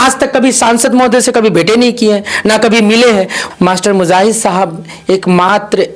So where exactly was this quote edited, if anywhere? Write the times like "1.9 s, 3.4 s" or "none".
3.4 s